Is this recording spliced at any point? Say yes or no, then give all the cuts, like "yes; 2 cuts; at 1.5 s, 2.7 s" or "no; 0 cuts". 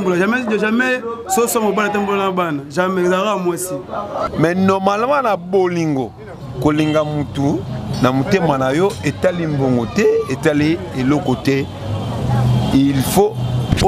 yes; 1 cut; at 4.2 s